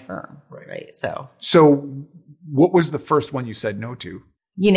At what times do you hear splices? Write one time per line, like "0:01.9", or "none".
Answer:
0:01.4